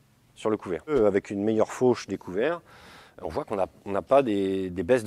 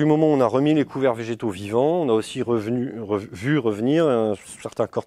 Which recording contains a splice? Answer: first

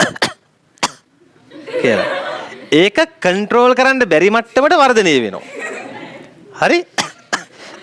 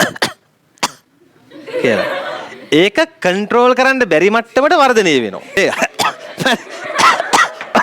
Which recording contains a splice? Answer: second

